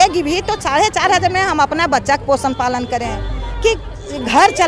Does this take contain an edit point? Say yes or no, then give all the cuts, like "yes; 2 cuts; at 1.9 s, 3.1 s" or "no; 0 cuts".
no; 0 cuts